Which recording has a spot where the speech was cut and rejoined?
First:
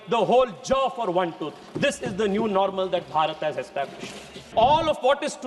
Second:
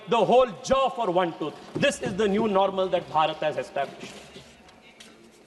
first; 1 cut; at 4.5 s

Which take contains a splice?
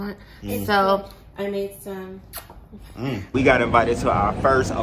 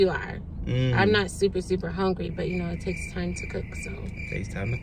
first; 1 cut; at 3.3 s

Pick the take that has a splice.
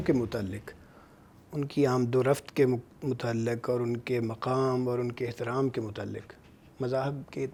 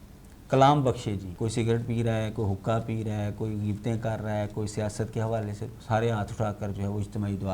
second; 2 cuts; at 1.3 s, 5.7 s

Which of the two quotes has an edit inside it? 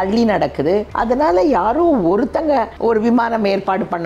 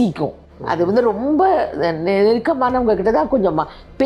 first; 2 cuts; at 0.9 s, 2.7 s

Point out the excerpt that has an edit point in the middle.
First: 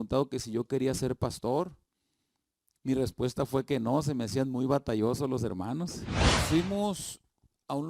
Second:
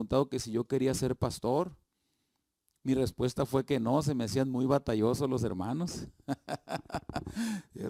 first; 1 cut; at 6.1 s

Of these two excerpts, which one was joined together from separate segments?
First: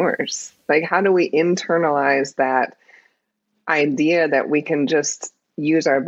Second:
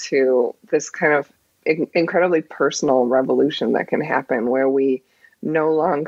second; 1 cut; at 1.5 s

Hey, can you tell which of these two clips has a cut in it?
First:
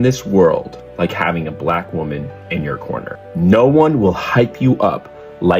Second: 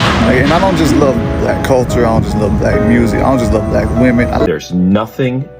second; 1 cut; at 4.5 s

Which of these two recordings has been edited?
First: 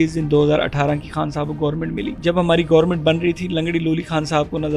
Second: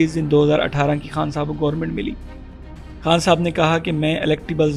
first; 1 cut; at 2.2 s

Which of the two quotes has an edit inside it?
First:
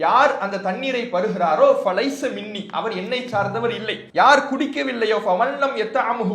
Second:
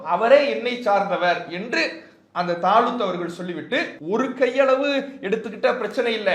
first; 1 cut; at 4.0 s

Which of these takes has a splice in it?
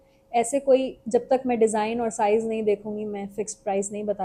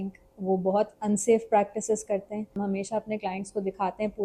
second; 1 cut; at 2.5 s

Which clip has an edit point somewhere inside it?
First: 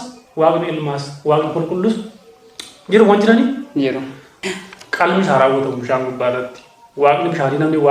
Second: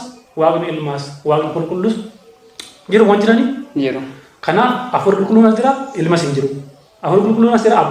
first; 1 cut; at 4.3 s

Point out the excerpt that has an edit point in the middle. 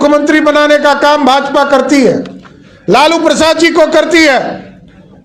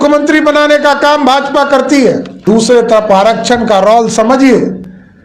second; 1 cut; at 2.4 s

